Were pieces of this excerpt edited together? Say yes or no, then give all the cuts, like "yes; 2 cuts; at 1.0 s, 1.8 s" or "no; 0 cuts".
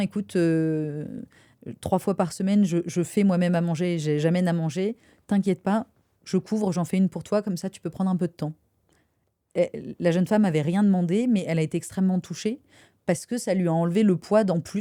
no; 0 cuts